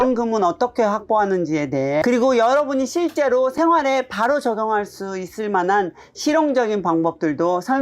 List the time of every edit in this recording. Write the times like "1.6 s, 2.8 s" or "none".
2.0 s